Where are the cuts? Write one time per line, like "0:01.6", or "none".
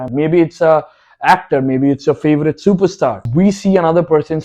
0:03.2